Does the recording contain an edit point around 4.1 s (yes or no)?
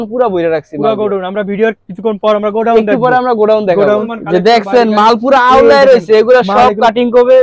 yes